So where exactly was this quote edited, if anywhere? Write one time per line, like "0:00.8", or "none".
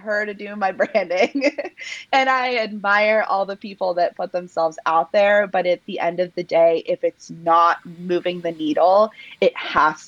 none